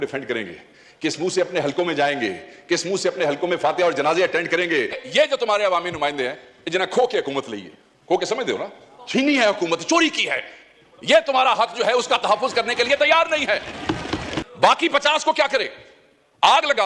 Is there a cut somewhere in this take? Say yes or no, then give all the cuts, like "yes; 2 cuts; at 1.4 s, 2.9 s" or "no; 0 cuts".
yes; 2 cuts; at 5.0 s, 14.4 s